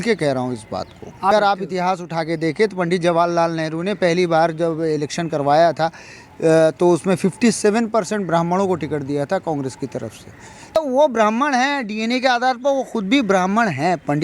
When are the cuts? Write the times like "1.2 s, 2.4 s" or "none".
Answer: 1.3 s, 10.8 s